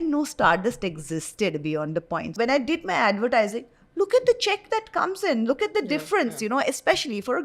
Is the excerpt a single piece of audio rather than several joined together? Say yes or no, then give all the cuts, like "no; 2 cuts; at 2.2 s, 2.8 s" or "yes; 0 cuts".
no; 1 cut; at 2.3 s